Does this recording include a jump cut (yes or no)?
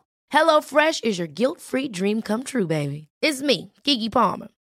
no